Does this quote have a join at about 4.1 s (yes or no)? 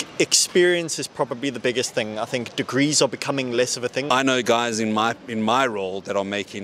yes